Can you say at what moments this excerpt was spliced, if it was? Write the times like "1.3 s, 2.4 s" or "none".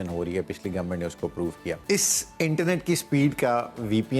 1.8 s